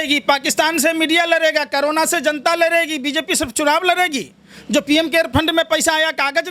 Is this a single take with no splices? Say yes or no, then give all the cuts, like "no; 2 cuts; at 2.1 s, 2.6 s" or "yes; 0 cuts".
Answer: yes; 0 cuts